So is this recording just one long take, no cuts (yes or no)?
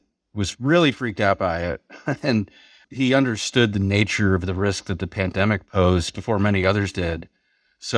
no